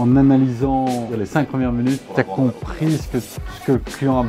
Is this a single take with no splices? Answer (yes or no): no